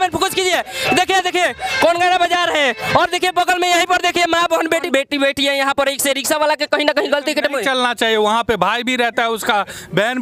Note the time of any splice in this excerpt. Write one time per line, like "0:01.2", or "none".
0:04.9